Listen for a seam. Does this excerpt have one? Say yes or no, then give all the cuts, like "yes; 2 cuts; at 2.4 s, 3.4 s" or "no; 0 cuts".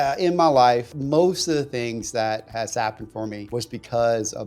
yes; 2 cuts; at 0.9 s, 3.4 s